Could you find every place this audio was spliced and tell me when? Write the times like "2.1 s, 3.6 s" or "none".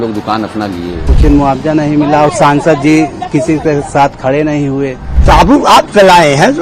1.1 s, 5.1 s